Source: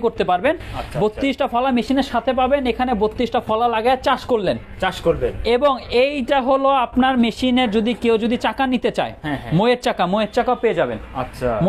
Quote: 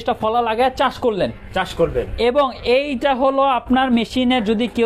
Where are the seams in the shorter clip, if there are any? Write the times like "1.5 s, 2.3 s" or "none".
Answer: none

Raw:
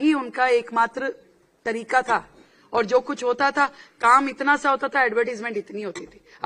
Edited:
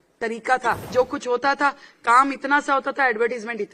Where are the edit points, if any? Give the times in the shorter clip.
0.9 s

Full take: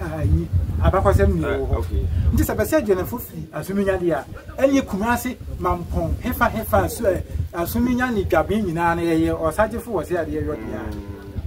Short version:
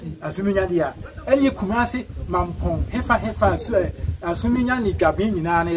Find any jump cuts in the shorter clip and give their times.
none

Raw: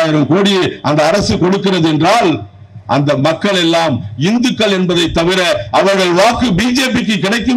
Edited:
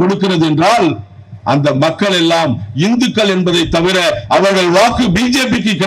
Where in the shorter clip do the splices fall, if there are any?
none

